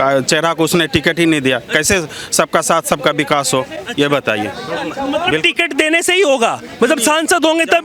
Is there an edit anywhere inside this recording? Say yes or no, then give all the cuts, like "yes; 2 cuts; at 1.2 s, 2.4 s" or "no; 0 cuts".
no; 0 cuts